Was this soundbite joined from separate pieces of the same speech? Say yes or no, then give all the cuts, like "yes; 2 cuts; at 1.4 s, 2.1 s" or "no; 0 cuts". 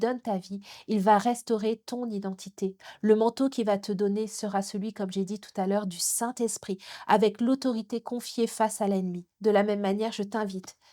yes; 1 cut; at 9.3 s